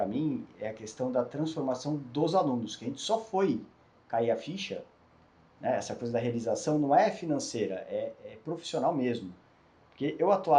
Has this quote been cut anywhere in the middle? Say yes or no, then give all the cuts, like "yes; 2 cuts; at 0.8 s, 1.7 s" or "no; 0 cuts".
no; 0 cuts